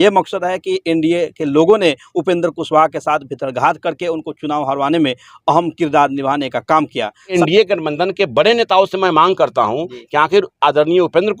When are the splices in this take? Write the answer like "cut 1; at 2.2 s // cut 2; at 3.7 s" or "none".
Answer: cut 1; at 7.3 s